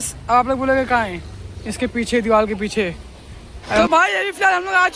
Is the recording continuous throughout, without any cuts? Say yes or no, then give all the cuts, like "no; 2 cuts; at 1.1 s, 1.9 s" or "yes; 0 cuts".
no; 1 cut; at 3.8 s